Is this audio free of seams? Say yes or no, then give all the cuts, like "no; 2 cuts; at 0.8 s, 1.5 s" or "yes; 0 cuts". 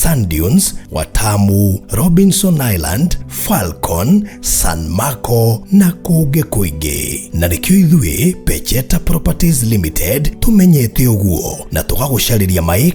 yes; 0 cuts